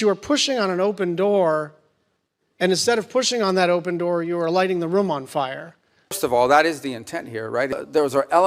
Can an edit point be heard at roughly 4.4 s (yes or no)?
no